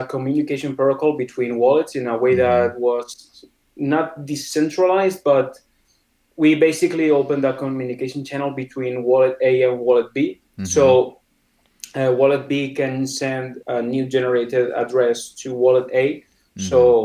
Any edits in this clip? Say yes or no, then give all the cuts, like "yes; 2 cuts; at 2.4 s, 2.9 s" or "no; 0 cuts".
yes; 1 cut; at 13.6 s